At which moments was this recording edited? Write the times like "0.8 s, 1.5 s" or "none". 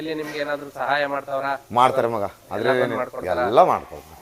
none